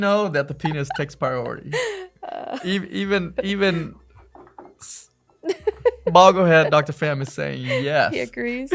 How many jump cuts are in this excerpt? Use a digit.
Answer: 0